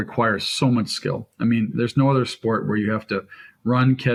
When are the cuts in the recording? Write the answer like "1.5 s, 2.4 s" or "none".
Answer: none